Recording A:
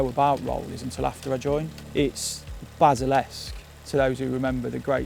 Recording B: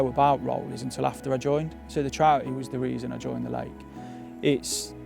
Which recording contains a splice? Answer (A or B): A